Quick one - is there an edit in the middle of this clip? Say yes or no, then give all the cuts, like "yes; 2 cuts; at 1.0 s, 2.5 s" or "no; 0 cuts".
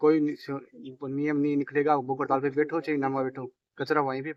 no; 0 cuts